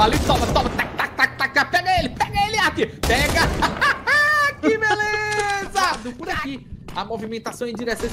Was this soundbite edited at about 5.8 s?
yes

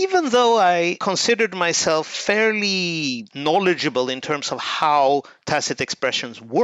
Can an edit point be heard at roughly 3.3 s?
yes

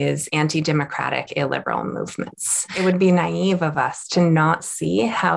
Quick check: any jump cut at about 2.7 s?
yes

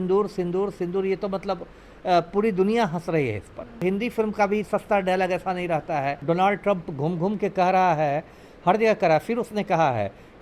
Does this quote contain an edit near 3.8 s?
yes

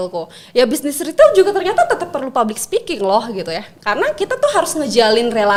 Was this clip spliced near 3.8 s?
no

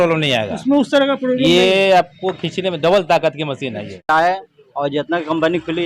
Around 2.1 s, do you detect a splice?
no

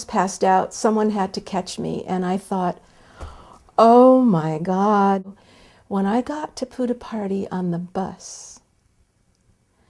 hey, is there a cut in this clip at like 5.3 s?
yes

